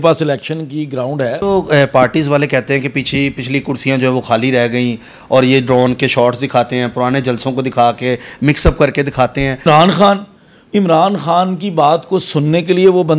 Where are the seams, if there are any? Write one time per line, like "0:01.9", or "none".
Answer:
0:01.4
0:09.7